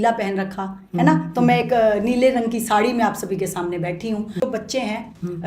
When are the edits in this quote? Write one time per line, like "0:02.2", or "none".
0:04.4